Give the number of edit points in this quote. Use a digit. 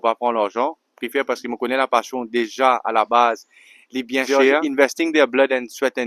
1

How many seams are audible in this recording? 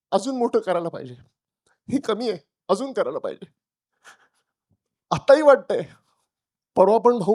0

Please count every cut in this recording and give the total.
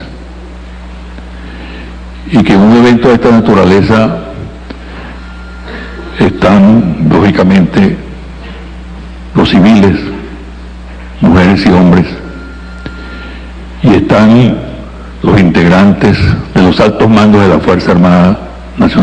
0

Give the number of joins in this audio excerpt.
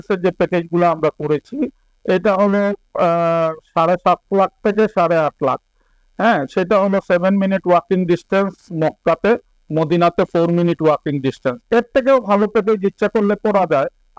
0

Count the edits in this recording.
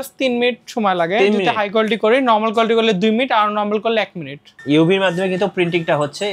1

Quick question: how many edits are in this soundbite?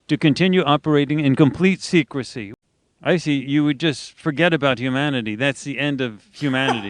1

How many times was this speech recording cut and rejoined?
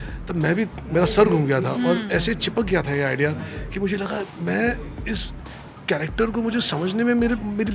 0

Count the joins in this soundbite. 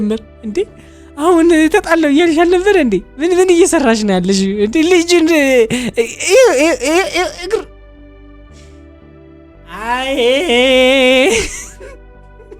0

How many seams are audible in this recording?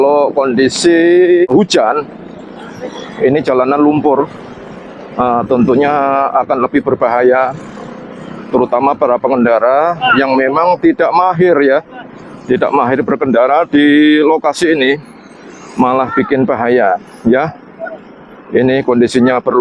1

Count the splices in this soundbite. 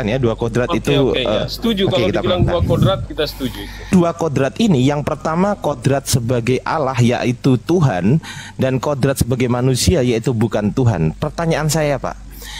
1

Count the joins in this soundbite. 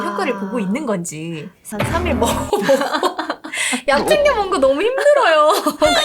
1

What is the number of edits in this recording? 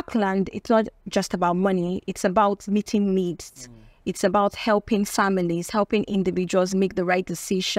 0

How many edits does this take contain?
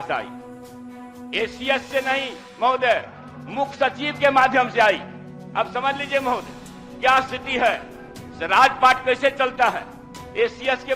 0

